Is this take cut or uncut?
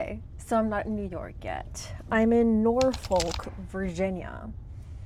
uncut